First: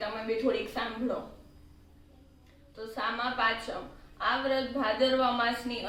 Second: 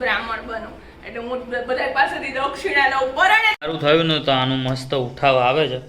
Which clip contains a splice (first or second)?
second